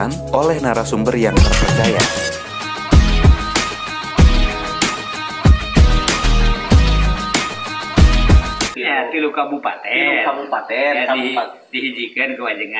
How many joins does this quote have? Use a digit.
2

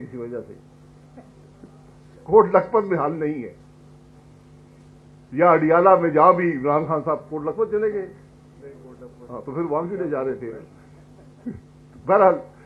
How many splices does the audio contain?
0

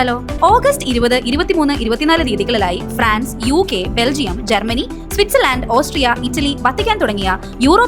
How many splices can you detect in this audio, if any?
0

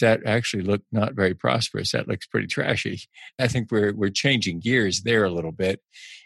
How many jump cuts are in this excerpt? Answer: 1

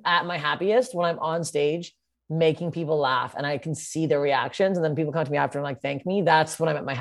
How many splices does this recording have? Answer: 0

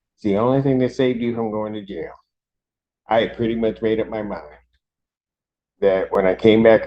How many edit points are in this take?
0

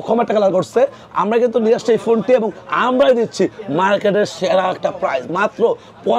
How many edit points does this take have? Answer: 0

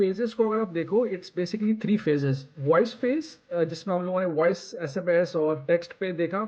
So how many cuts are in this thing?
1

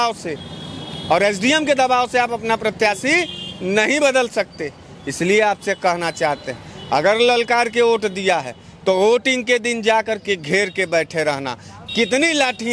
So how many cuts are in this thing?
0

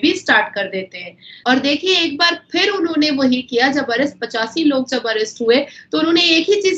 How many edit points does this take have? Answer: 1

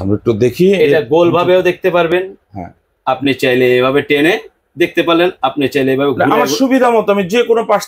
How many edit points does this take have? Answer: 0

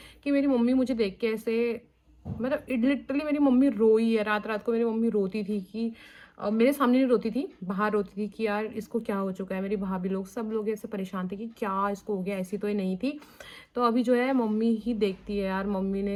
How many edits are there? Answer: 0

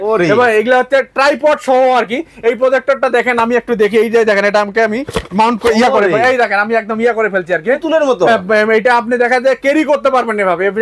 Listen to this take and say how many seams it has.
0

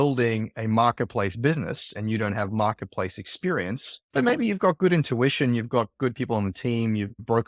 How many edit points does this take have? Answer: 0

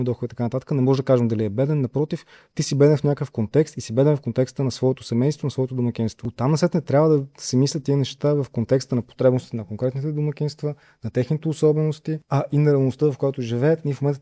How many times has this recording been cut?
2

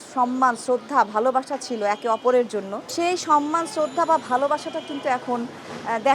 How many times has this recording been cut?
0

